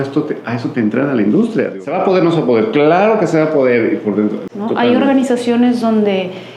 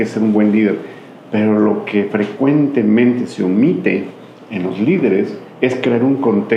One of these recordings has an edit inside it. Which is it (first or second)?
first